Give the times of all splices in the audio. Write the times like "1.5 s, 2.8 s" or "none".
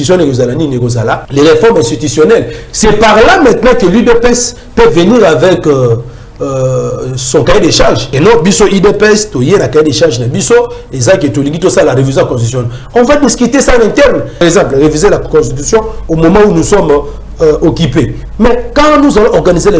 1.2 s, 8.1 s, 14.4 s, 18.2 s